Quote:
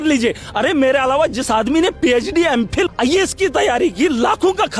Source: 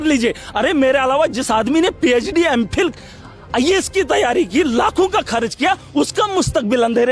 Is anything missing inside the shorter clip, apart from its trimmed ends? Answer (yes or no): yes